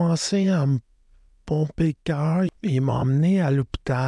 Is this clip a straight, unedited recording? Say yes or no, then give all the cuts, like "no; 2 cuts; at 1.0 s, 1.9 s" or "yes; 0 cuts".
no; 1 cut; at 2.5 s